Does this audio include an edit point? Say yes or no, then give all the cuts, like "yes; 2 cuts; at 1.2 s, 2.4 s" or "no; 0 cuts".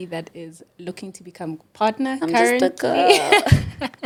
no; 0 cuts